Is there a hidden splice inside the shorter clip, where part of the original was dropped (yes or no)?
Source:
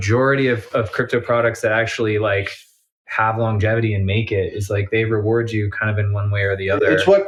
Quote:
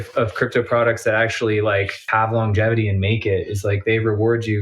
yes